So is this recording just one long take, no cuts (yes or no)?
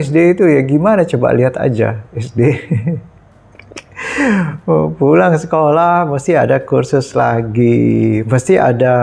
yes